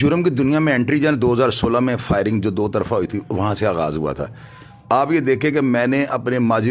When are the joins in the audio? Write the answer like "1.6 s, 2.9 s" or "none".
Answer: none